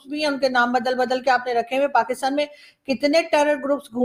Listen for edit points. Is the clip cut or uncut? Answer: uncut